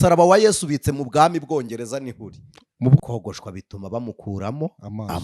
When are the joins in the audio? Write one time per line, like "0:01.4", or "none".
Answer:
0:03.0